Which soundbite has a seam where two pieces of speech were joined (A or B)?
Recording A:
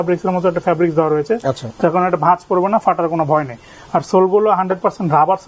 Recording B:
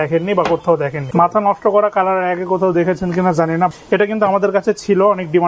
B